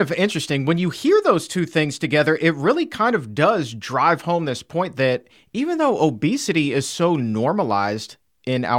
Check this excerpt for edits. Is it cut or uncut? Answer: uncut